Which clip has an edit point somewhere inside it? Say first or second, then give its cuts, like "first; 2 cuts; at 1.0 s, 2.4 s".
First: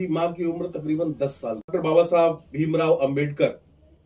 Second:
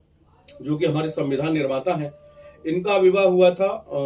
first; 1 cut; at 1.7 s